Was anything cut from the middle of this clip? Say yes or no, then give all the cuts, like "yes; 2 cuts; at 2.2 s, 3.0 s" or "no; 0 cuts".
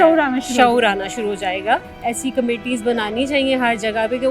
yes; 1 cut; at 1.9 s